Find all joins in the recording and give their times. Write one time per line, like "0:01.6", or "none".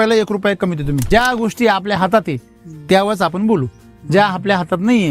0:01.0

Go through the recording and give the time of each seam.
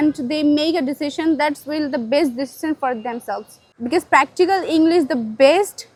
none

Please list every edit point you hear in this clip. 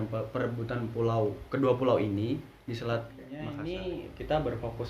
0:03.5

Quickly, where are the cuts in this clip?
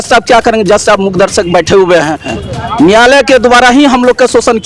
0:02.4

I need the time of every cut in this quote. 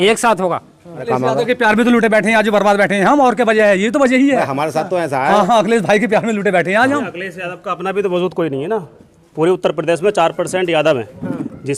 0:01.1

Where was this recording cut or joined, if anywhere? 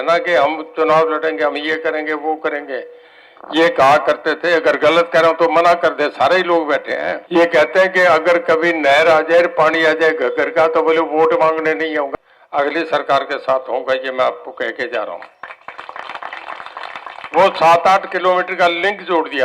0:07.2
0:12.1

